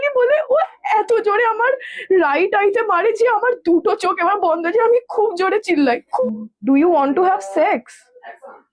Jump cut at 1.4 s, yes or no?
no